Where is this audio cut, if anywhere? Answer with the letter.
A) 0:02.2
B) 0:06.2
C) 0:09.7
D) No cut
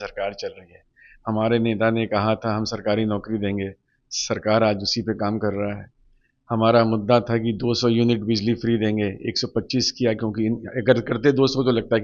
D